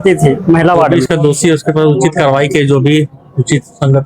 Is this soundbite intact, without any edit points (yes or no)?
no